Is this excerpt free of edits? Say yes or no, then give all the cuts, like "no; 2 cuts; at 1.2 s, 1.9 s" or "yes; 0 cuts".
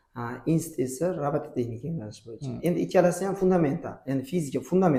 yes; 0 cuts